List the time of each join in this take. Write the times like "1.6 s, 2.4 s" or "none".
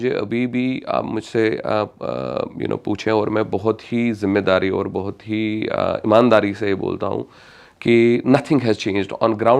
none